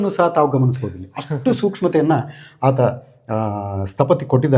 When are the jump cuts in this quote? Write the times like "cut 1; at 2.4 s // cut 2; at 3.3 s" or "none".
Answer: none